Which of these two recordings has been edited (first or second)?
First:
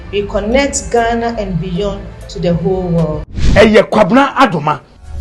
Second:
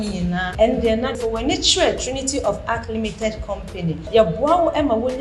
first